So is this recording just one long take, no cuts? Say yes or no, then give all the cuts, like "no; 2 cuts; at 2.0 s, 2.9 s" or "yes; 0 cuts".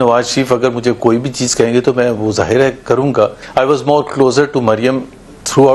no; 1 cut; at 3.4 s